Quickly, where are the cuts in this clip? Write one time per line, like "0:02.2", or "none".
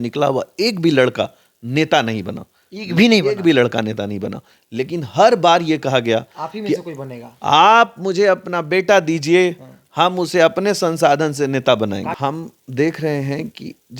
0:12.1